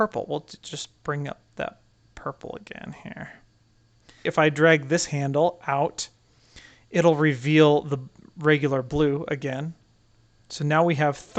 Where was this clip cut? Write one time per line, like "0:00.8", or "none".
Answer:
0:04.2